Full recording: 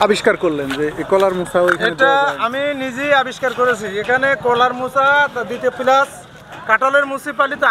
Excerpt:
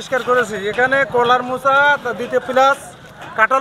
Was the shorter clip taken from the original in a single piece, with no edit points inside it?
yes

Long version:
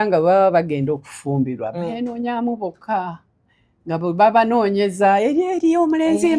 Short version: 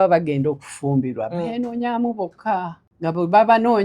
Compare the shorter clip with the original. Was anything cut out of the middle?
yes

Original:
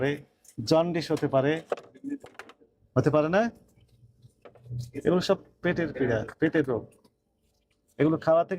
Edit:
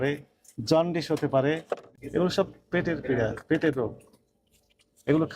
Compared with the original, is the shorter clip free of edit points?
no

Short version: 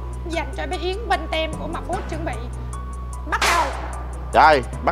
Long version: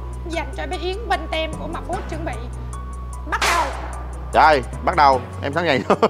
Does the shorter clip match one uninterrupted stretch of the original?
yes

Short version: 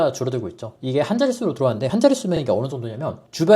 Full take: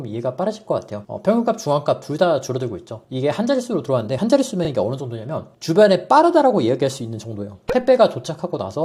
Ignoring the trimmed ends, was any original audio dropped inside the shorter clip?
no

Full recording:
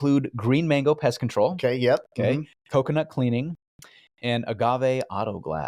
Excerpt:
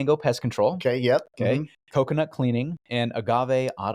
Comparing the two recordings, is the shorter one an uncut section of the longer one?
no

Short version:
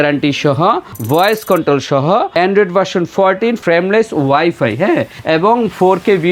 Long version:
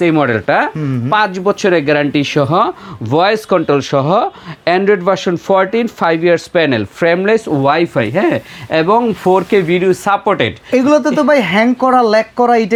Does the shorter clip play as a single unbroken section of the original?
no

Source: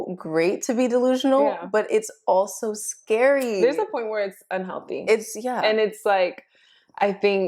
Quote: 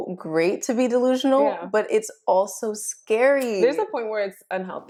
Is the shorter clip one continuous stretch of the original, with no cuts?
yes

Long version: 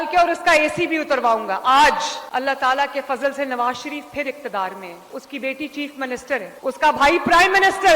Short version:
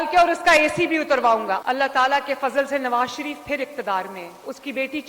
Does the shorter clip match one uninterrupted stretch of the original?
no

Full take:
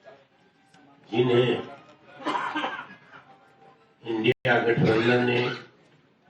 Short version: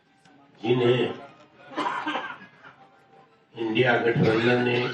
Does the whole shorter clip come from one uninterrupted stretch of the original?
no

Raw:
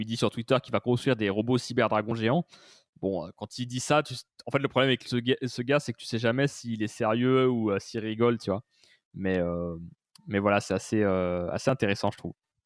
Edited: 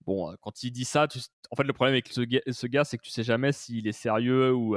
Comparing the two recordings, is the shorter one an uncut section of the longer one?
yes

